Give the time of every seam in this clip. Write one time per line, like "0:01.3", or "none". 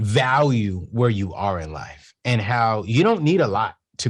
none